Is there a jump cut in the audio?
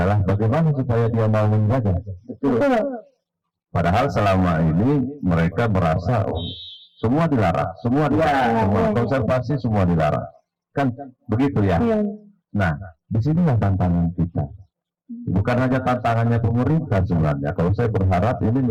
no; 0 cuts

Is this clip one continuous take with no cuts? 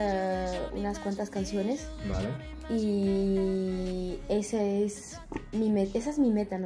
yes; 0 cuts

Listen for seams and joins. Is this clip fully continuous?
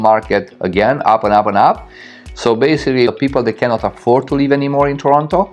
no; 1 cut; at 3.1 s

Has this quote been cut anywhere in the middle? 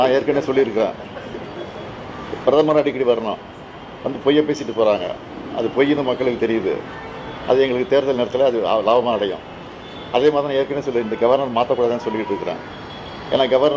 no; 0 cuts

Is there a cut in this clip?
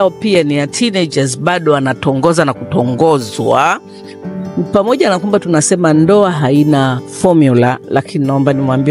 yes; 2 cuts; at 4.2 s, 7.0 s

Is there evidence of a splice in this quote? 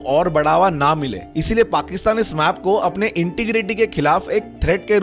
yes; 1 cut; at 1.3 s

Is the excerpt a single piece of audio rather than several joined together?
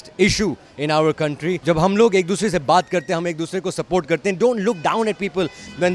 no; 1 cut; at 1.6 s

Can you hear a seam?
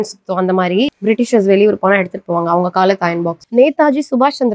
yes; 2 cuts; at 0.9 s, 3.4 s

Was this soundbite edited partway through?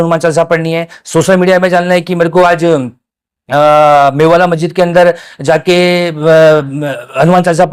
no; 0 cuts

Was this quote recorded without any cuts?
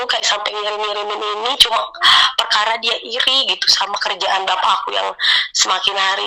yes; 0 cuts

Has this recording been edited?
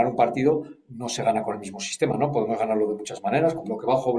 no; 0 cuts

